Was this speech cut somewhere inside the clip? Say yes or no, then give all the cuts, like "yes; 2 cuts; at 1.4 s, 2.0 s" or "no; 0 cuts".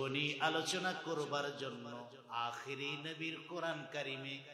no; 0 cuts